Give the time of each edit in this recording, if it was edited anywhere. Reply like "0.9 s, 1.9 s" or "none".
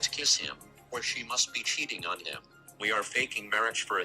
2.8 s

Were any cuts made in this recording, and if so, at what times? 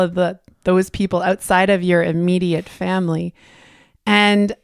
none

